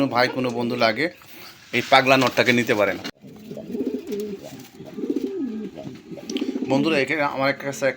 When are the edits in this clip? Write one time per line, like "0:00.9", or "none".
0:03.1